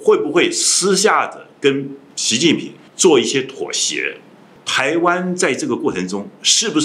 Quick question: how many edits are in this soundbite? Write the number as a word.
two